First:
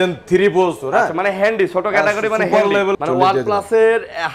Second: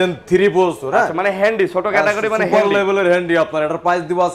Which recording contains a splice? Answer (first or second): first